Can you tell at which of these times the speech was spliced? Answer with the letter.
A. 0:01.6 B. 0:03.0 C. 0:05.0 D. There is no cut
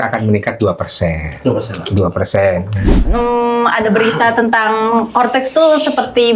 B